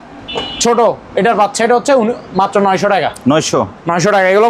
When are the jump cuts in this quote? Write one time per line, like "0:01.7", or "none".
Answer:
none